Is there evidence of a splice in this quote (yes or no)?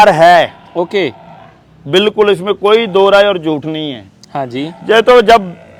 no